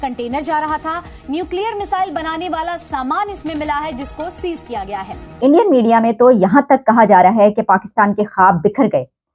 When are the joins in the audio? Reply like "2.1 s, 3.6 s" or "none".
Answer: 5.3 s

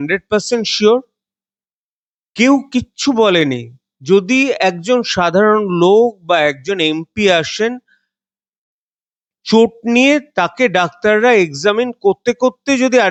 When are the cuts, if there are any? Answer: none

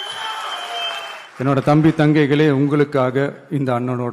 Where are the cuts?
1.2 s

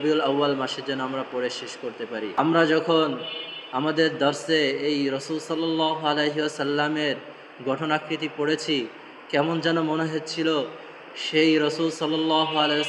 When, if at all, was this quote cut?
2.3 s

